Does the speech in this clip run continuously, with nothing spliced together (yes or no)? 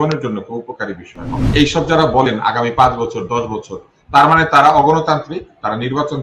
no